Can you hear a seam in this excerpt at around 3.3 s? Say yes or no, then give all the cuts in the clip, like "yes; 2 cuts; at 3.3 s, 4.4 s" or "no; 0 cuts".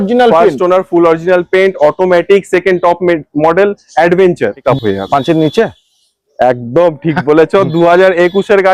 no; 1 cut; at 4.6 s